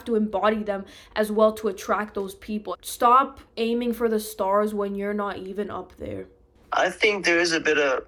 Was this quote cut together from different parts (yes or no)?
no